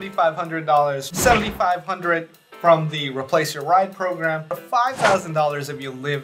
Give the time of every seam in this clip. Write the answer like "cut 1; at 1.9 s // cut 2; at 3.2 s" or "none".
cut 1; at 1.0 s // cut 2; at 4.6 s